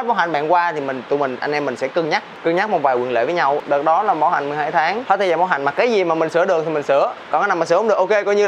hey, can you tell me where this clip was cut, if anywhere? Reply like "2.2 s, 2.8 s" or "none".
5.0 s